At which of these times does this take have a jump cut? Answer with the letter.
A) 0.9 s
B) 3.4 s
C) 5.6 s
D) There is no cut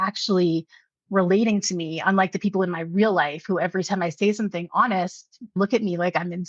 C